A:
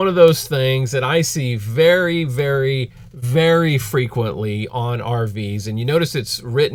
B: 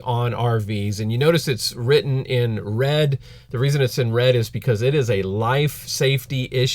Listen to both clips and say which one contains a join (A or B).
B